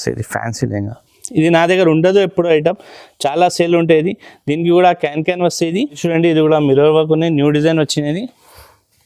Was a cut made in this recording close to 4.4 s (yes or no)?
no